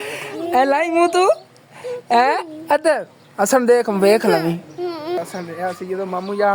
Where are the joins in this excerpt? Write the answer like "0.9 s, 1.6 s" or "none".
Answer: 5.2 s